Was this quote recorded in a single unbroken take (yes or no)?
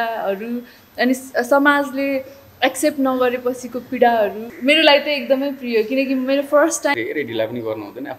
no